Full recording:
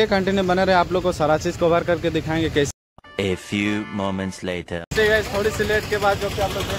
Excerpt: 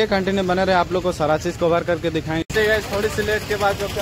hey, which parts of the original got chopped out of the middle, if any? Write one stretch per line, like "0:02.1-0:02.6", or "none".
0:02.4-0:04.9